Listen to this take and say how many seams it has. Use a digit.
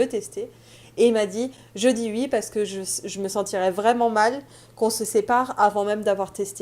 0